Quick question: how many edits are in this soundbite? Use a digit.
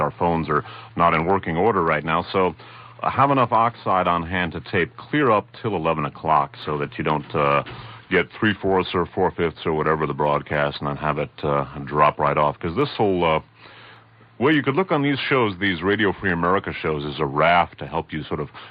1